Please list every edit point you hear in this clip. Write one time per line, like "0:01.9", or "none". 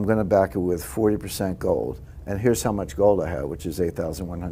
none